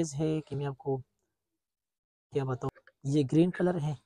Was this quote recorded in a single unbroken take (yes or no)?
no